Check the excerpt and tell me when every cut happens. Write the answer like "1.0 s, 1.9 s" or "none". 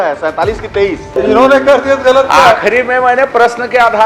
1.1 s